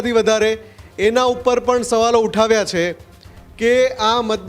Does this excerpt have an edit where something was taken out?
no; 0 cuts

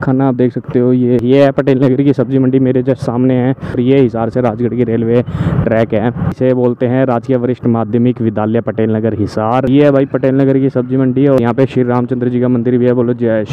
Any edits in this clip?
yes; 5 cuts; at 1.2 s, 3.7 s, 6.4 s, 9.7 s, 11.4 s

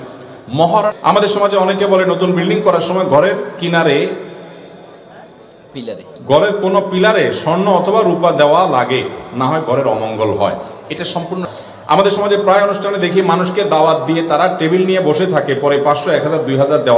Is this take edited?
yes; 2 cuts; at 0.9 s, 11.5 s

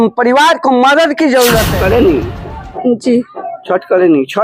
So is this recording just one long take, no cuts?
no; 1 cut; at 1.7 s

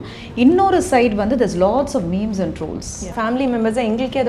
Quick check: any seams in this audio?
yes; 1 cut; at 3.1 s

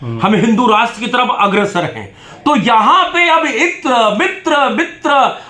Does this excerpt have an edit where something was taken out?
no; 0 cuts

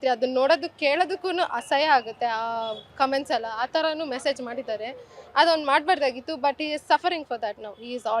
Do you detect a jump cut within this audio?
no; 0 cuts

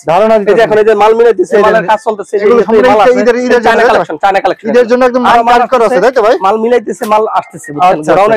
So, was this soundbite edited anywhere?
no; 0 cuts

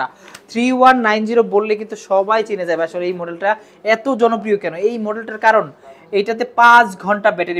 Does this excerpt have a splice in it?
no; 0 cuts

